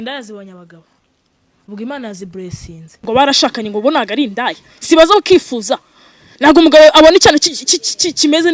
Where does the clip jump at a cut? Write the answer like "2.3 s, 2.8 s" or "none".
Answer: 3.0 s